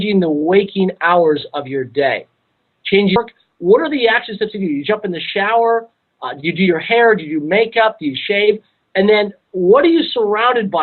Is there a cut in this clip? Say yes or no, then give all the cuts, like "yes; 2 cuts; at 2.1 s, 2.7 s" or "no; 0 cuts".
no; 0 cuts